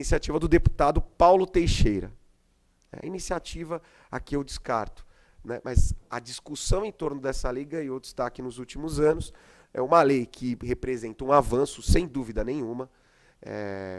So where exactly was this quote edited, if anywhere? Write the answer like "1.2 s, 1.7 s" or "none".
none

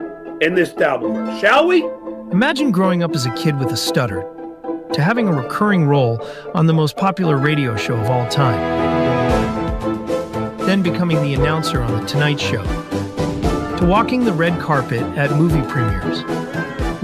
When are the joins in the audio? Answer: 2.0 s

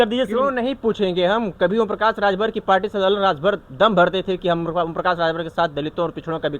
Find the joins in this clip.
none

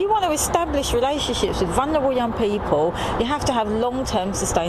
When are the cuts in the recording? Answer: 3.2 s

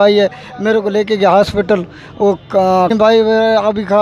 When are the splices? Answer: 2.9 s

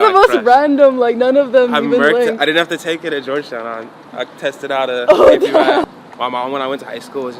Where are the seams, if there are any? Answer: 5.8 s

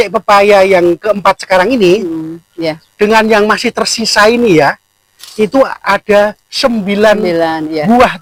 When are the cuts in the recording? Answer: none

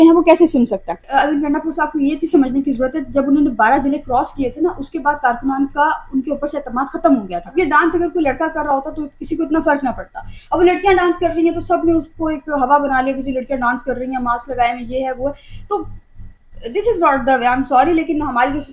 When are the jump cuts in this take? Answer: 1.1 s, 7.4 s

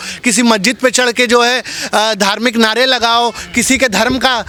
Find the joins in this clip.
none

